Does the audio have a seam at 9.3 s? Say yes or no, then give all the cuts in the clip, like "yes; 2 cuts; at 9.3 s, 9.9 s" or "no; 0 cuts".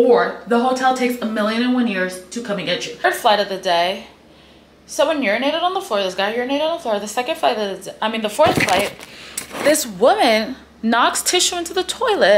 no; 1 cut; at 3.0 s